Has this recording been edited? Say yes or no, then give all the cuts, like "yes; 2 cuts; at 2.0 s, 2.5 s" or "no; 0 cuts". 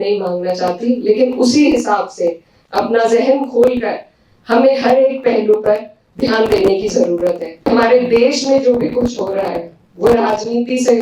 yes; 1 cut; at 7.7 s